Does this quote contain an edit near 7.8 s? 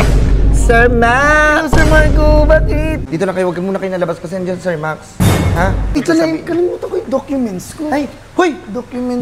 no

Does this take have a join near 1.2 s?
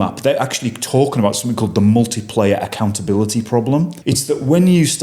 no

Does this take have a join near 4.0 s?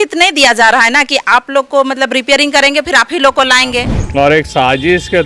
yes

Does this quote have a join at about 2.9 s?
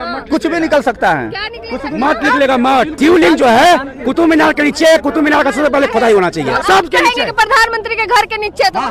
yes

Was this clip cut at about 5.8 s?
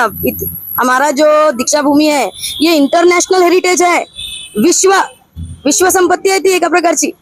no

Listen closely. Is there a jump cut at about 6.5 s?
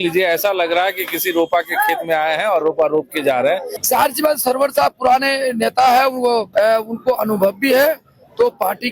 yes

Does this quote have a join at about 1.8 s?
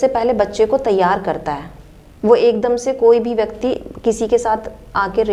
no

